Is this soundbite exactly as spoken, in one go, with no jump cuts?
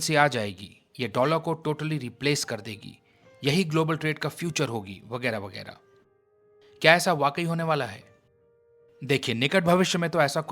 yes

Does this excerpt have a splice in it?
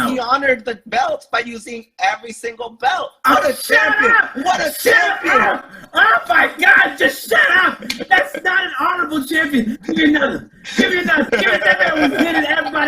yes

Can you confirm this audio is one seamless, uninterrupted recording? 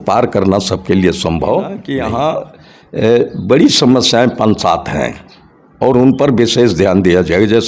no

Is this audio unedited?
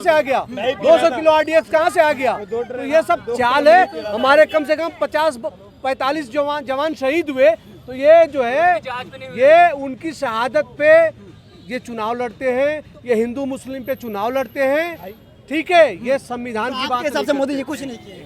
yes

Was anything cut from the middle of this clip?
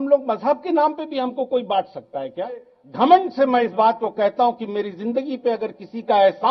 yes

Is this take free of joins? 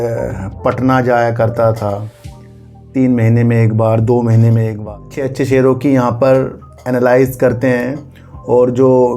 no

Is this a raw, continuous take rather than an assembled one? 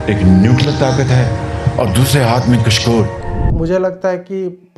no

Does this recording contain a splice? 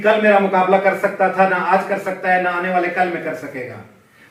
no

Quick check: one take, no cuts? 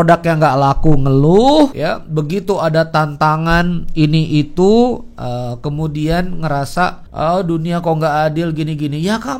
no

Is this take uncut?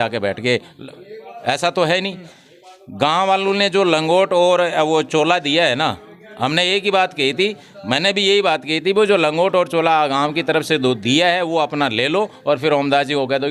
yes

